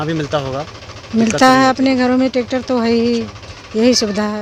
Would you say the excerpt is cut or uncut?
uncut